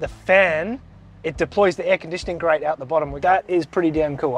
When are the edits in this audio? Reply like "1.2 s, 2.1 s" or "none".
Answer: 3.1 s